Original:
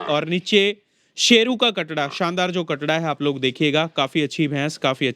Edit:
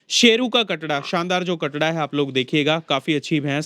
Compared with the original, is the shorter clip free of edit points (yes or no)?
yes